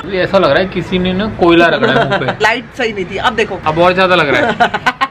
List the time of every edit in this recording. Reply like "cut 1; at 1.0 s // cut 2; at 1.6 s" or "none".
cut 1; at 2.4 s